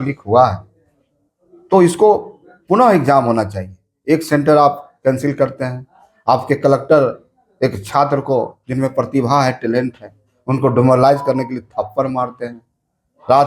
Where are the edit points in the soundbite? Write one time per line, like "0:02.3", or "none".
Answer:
none